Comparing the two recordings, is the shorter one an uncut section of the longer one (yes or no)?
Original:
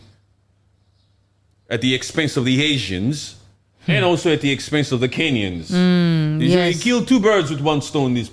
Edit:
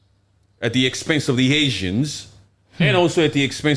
yes